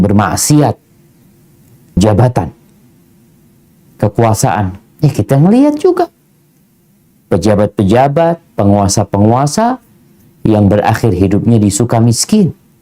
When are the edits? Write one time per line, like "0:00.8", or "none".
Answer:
0:02.0